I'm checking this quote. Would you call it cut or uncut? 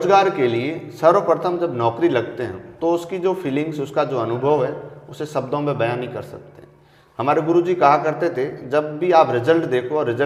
uncut